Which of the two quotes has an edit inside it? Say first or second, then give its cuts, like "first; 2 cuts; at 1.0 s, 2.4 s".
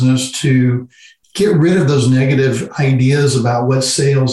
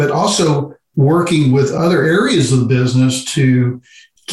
second; 1 cut; at 1.7 s